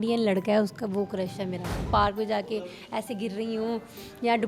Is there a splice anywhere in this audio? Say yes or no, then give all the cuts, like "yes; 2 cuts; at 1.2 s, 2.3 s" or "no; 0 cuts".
yes; 1 cut; at 1.8 s